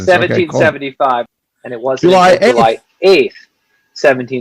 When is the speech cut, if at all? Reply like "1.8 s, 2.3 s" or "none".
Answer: 1.3 s